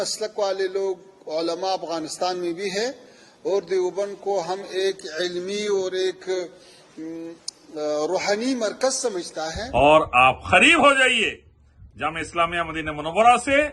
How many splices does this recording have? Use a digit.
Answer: 1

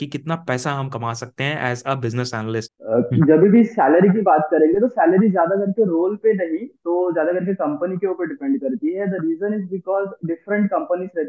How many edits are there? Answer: 0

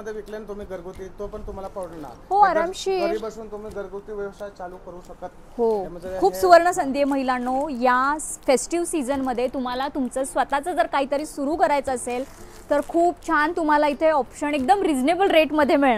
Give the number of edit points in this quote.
0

